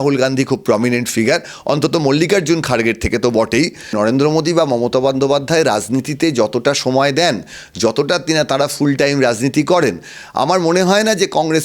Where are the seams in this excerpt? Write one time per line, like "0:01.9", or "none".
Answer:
0:03.9